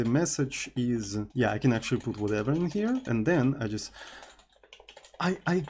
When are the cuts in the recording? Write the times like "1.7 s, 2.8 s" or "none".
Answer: 1.3 s, 3.1 s